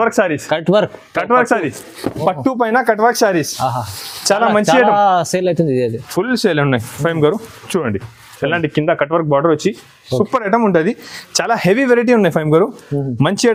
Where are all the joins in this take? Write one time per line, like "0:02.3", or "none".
none